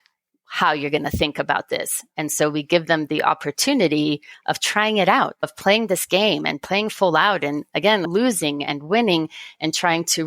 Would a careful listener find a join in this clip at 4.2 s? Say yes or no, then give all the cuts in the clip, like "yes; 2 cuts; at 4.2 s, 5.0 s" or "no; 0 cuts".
no; 1 cut; at 5.5 s